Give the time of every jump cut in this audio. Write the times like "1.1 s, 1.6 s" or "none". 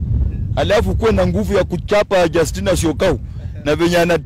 none